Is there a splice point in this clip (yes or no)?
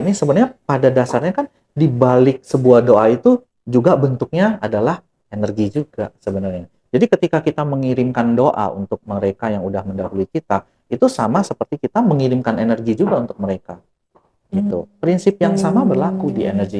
no